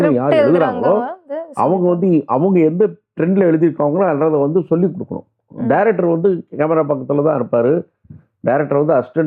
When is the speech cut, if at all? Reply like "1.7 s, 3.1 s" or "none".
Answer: none